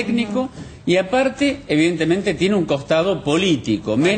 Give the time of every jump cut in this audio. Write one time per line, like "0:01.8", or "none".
none